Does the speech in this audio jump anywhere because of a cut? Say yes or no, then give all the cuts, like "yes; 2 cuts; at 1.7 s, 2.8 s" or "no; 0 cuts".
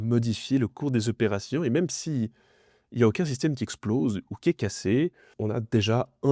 yes; 1 cut; at 5.3 s